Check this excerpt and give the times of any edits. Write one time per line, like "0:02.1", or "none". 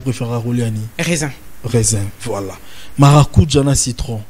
none